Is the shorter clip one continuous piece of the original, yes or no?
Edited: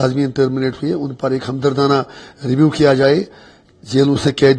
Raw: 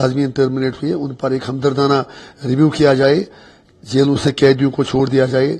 yes